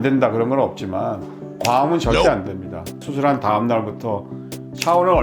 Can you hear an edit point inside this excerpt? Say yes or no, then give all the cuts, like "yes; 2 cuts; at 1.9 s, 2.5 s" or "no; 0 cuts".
yes; 1 cut; at 3.0 s